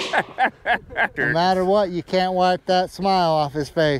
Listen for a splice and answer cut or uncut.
cut